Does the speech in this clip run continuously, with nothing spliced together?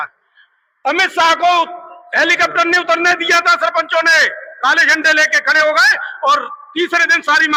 yes; 0 cuts

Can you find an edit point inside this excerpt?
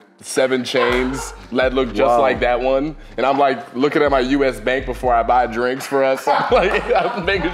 no; 0 cuts

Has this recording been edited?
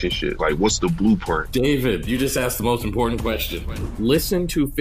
no; 0 cuts

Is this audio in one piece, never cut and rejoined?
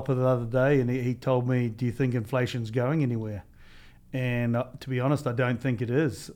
yes; 0 cuts

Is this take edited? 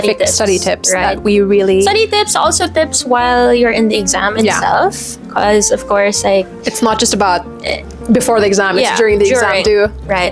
no; 0 cuts

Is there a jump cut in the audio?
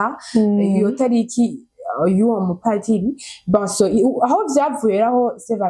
no; 0 cuts

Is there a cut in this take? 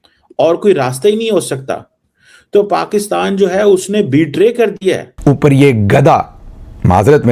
yes; 1 cut; at 5.1 s

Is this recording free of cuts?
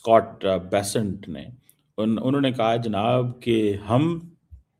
yes; 0 cuts

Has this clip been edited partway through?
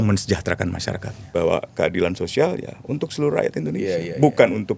yes; 1 cut; at 1.1 s

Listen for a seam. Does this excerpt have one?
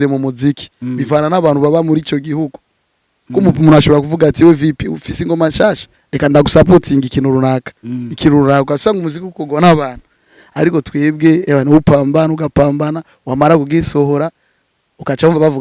no; 0 cuts

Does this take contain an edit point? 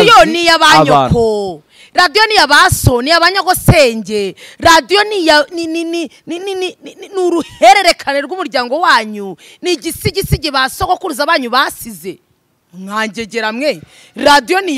no; 0 cuts

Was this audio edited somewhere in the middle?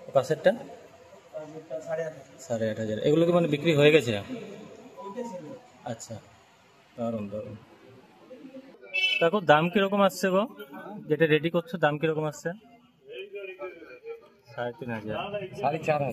no; 0 cuts

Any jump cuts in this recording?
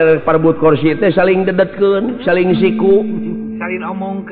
no; 0 cuts

